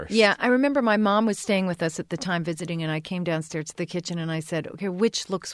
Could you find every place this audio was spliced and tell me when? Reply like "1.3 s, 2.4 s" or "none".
none